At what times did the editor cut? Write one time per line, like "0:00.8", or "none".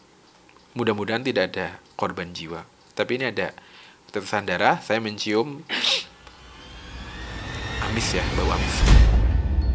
0:08.6